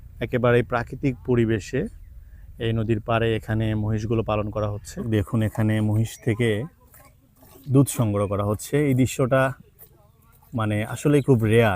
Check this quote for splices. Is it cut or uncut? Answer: cut